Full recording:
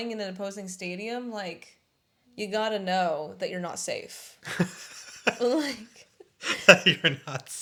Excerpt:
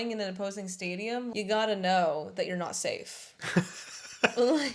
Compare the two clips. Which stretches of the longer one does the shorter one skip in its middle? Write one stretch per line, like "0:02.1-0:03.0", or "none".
0:01.3-0:02.3